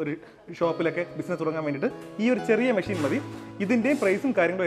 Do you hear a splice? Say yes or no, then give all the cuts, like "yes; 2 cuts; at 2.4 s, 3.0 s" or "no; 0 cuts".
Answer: no; 0 cuts